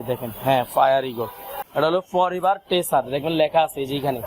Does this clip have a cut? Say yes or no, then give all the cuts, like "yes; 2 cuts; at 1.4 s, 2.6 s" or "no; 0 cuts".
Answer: yes; 1 cut; at 1.6 s